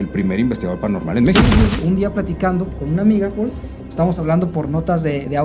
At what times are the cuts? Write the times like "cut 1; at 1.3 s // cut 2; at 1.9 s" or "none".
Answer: cut 1; at 1.8 s